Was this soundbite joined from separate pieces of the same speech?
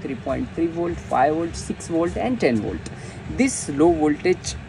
no; 0 cuts

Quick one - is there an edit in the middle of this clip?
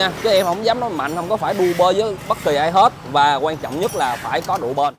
no; 0 cuts

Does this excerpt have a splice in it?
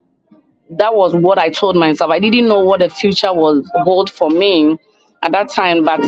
no; 0 cuts

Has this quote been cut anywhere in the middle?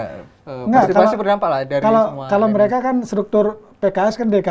no; 0 cuts

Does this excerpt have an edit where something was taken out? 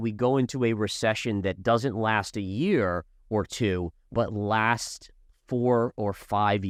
no; 0 cuts

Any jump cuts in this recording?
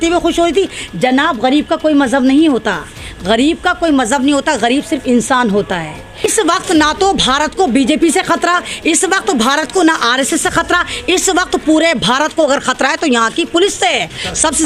yes; 1 cut; at 6.3 s

